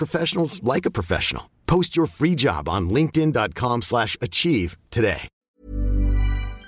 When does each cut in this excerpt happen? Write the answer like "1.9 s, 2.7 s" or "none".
5.5 s